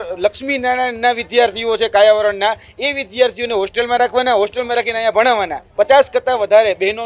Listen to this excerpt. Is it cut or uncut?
cut